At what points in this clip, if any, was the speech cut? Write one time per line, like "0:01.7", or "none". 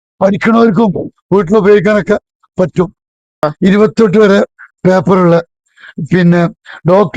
0:03.3